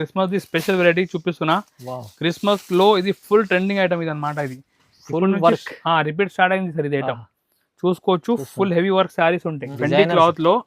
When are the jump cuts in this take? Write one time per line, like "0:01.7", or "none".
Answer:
0:09.6